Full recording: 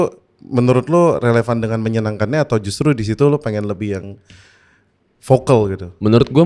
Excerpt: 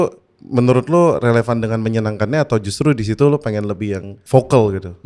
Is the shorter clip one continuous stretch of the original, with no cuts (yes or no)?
no